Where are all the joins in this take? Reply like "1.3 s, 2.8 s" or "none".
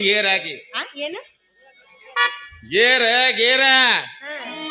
none